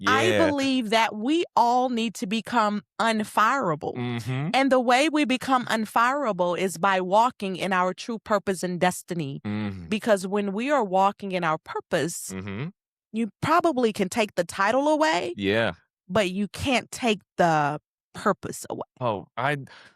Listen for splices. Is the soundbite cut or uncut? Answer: cut